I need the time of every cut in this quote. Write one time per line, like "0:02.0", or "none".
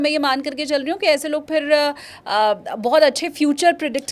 none